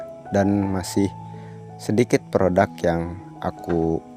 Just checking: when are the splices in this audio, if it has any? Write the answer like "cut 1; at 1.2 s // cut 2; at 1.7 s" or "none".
none

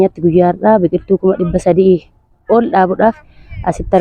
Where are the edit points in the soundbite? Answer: none

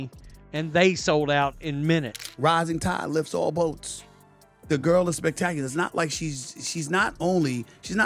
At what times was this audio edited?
cut 1; at 2.2 s

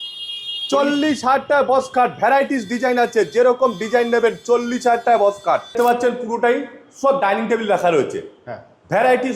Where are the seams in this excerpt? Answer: cut 1; at 5.6 s

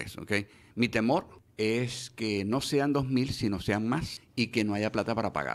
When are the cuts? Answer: cut 1; at 1.4 s // cut 2; at 4.2 s

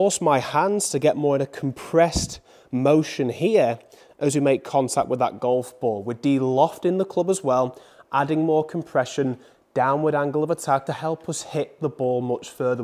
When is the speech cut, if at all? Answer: cut 1; at 10.8 s

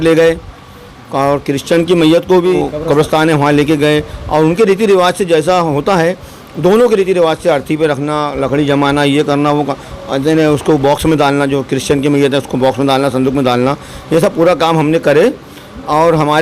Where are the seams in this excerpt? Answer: cut 1; at 2.6 s

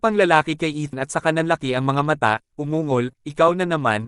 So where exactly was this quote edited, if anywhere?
cut 1; at 0.9 s

